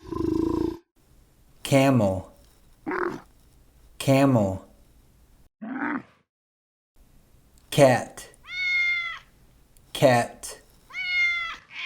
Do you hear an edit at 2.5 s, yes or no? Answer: no